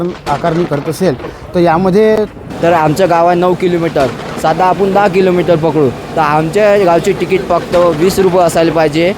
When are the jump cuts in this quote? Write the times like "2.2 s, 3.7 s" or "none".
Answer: 2.4 s